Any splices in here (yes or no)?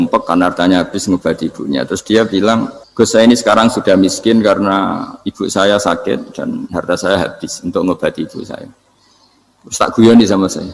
yes